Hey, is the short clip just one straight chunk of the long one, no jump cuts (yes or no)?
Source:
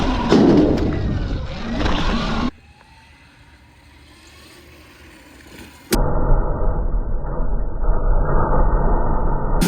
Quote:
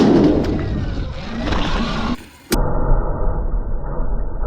no